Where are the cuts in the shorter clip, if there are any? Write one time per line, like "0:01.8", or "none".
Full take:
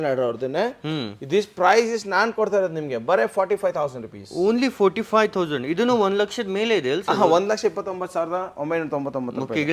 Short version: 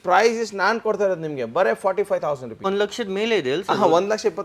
0:02.7